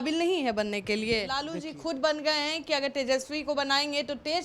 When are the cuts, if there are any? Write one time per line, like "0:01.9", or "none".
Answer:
0:01.4